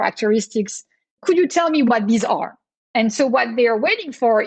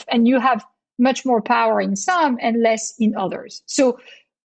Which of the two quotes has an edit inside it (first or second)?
first